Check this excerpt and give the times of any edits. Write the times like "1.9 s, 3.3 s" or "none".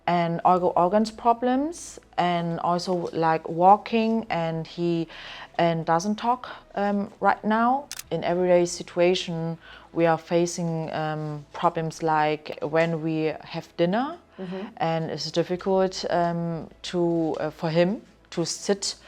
7.9 s, 12.5 s